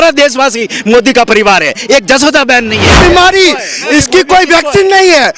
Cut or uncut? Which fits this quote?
cut